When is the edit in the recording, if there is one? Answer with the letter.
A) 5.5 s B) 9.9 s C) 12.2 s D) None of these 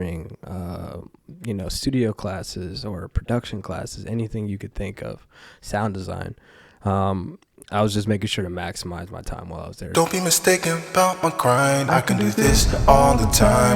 B